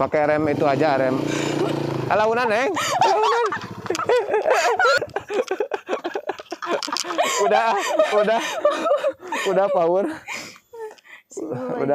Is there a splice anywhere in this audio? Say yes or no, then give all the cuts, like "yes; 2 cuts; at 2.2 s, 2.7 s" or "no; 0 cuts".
yes; 1 cut; at 5.0 s